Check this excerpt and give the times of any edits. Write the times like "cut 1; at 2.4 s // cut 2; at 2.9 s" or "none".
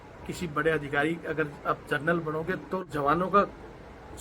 cut 1; at 2.8 s